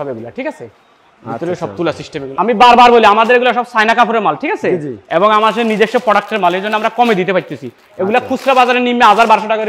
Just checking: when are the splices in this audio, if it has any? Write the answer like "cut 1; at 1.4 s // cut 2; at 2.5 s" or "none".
cut 1; at 2.3 s